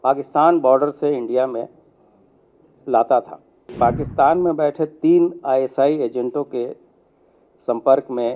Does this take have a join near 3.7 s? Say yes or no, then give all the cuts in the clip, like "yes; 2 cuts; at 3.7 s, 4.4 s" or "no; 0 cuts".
yes; 1 cut; at 3.7 s